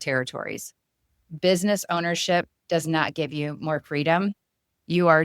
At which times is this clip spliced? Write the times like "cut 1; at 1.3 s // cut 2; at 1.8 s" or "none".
cut 1; at 1.4 s